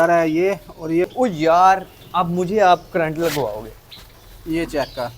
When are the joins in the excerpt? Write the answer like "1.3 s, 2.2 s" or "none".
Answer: 1.1 s